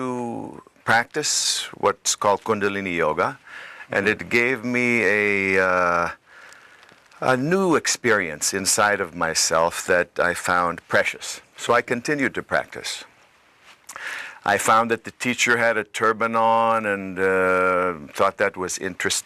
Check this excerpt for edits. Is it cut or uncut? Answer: cut